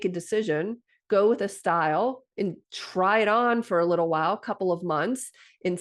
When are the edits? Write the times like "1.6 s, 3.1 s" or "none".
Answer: none